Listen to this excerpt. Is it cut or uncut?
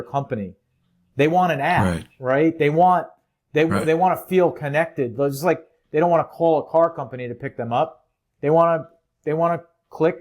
uncut